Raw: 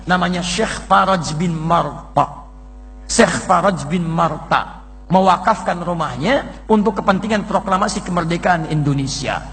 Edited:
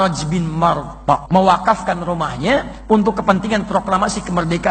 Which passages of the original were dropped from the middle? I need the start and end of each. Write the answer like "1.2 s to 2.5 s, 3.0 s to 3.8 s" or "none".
2.3 s to 5.0 s